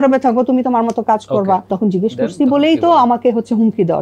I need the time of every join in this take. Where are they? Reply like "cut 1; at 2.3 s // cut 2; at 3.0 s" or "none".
cut 1; at 1.7 s